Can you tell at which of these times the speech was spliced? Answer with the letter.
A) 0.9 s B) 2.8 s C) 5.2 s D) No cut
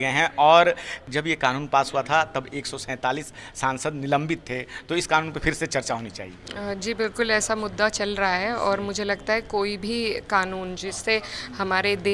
A